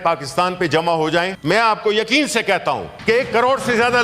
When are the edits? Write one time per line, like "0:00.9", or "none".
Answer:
0:01.3
0:02.9